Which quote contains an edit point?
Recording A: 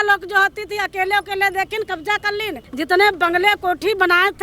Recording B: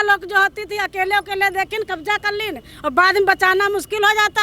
A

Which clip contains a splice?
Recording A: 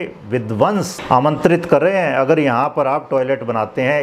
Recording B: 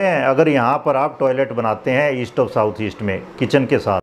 A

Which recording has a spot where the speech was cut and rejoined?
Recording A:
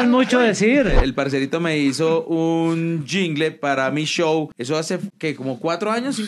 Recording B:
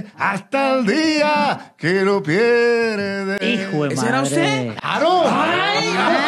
A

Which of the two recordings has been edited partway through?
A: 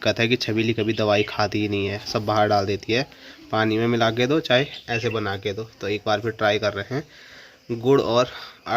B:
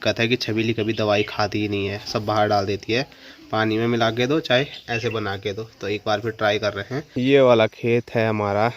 B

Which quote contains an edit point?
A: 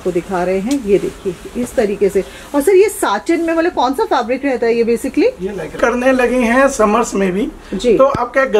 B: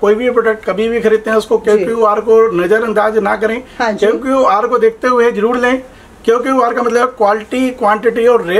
A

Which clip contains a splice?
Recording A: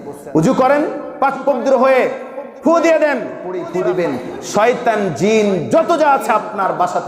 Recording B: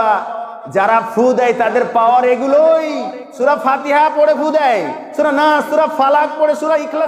A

